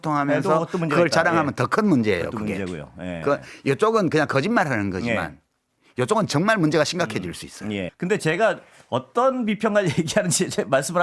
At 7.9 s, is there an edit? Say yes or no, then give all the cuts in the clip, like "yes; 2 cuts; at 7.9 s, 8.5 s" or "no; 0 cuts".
yes; 1 cut; at 7.9 s